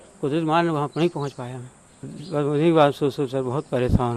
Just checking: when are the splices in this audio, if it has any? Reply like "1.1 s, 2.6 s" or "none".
2.1 s